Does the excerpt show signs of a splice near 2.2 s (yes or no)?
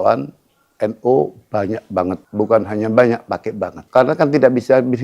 yes